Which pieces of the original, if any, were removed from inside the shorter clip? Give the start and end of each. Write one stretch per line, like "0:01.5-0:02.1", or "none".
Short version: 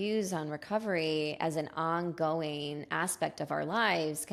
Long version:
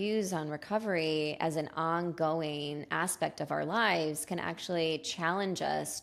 none